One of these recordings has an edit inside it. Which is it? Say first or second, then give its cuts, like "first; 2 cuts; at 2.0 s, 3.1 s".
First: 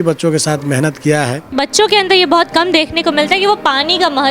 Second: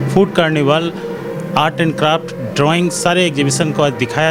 first; 1 cut; at 1.5 s